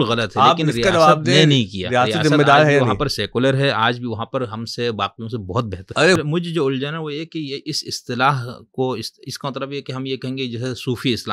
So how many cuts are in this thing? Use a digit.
1